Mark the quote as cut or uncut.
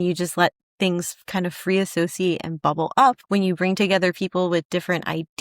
cut